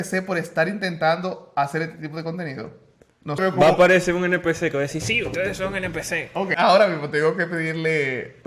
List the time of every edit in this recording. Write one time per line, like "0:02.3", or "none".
0:03.4
0:06.5

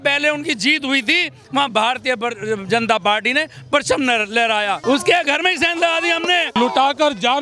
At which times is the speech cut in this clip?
0:04.8
0:06.6

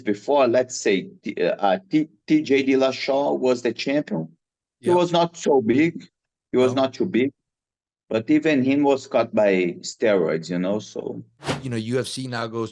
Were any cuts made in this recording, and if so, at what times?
0:11.6

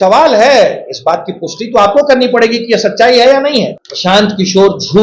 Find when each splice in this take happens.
0:03.9

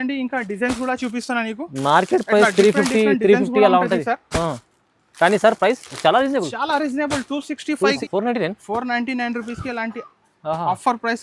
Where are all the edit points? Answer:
0:08.0

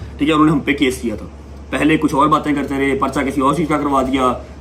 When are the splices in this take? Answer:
none

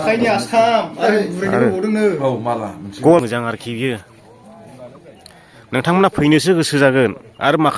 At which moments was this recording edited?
0:03.2

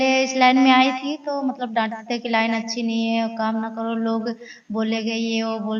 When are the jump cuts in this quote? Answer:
none

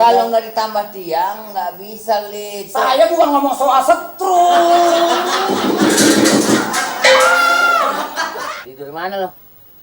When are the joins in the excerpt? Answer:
0:08.4

